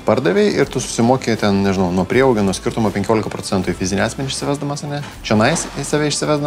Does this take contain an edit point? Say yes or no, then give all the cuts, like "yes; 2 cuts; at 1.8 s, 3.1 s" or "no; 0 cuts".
no; 0 cuts